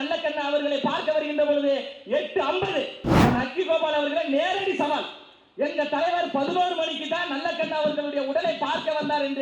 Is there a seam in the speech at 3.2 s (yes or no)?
yes